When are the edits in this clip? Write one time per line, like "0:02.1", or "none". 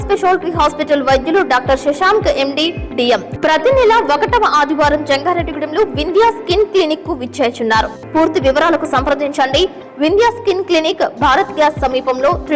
0:03.3
0:08.0